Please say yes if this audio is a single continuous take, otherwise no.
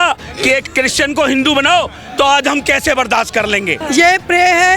no